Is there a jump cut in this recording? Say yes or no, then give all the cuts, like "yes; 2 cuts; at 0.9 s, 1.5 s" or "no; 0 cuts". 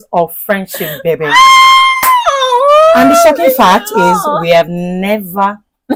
no; 0 cuts